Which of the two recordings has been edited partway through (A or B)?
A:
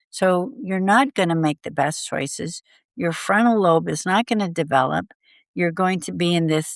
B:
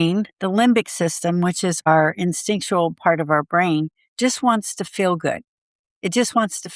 B